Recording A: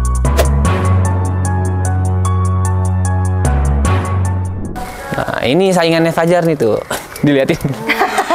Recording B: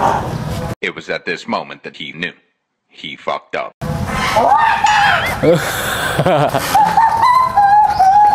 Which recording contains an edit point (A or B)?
A